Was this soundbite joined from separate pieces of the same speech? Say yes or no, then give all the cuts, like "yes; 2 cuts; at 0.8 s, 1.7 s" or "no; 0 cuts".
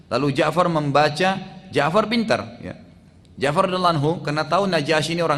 no; 0 cuts